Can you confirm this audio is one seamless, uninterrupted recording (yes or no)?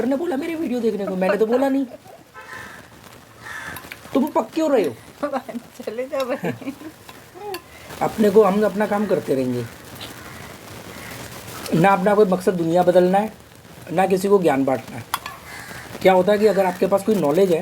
no